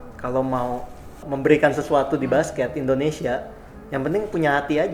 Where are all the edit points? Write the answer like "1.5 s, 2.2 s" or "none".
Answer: 1.2 s